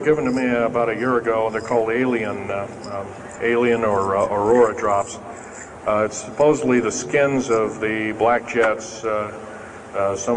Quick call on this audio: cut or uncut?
uncut